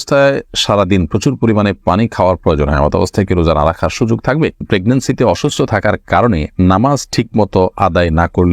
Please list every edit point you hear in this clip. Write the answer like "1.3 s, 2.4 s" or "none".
4.6 s